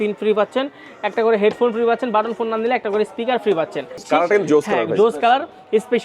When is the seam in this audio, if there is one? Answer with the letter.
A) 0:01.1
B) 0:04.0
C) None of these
B